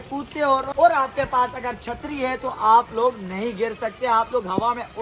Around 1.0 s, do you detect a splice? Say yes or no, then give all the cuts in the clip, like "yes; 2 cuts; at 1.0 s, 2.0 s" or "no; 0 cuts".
no; 0 cuts